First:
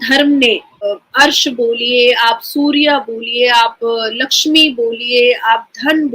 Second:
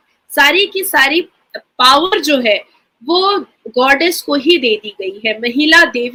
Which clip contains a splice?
first; 1 cut; at 1.0 s

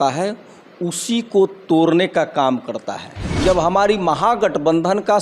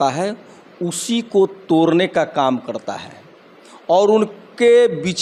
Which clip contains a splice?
first; 1 cut; at 3.3 s

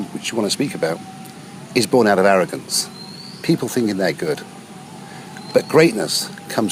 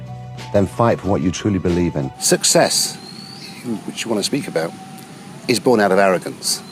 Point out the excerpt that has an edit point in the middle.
second; 1 cut; at 2.1 s

